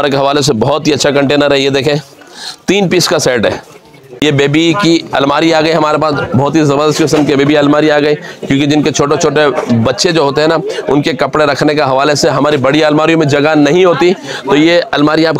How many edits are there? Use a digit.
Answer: 1